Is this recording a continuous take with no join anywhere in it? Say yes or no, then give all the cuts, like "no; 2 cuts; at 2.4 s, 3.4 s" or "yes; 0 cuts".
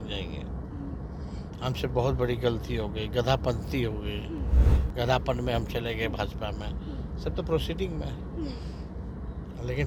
yes; 0 cuts